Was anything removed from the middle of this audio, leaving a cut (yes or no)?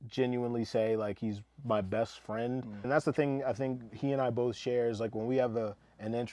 yes